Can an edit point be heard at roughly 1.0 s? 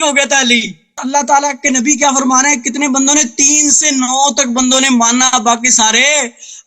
yes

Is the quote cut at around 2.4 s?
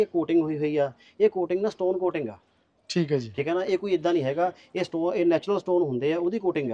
no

